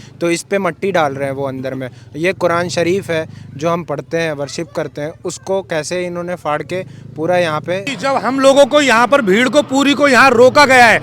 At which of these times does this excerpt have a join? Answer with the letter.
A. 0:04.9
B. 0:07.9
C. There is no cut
B